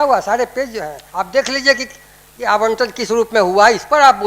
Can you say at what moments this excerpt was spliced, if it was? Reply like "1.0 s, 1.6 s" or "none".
1.0 s